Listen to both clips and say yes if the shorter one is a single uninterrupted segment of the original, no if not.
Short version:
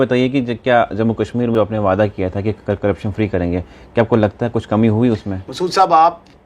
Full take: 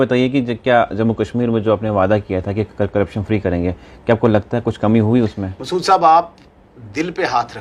no